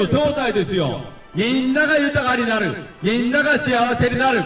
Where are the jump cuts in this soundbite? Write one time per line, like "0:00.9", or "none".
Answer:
0:01.2